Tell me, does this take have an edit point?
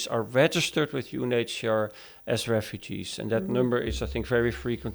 no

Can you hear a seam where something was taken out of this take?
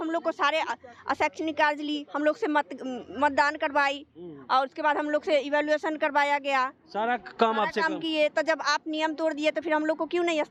no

